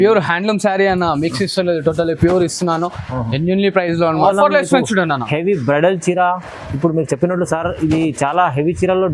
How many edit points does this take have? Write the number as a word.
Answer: one